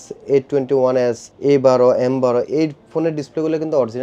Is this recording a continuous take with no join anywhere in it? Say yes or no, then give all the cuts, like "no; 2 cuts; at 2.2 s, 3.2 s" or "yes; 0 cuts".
no; 1 cut; at 1.3 s